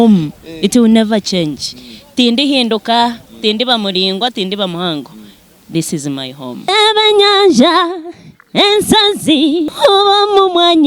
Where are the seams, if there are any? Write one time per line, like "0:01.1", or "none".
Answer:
0:06.7